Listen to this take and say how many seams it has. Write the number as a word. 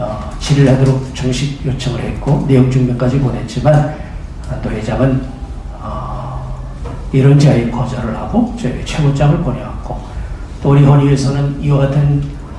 zero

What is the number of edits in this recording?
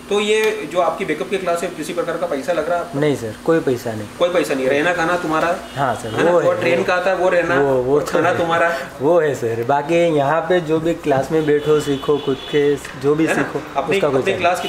zero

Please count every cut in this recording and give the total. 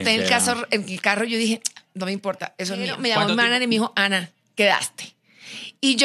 one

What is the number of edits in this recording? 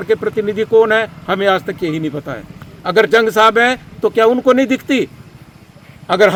zero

